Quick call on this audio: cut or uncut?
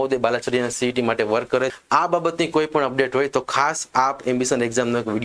cut